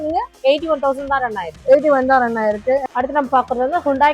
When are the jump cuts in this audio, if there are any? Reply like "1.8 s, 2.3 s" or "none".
2.9 s